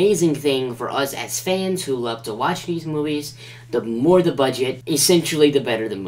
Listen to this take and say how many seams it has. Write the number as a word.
one